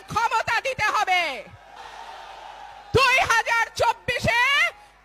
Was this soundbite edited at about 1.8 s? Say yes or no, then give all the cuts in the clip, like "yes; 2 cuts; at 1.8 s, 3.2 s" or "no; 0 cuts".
yes; 1 cut; at 1.8 s